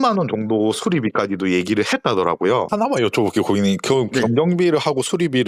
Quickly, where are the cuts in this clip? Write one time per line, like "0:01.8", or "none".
0:02.7